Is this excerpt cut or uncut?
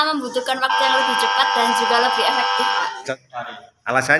cut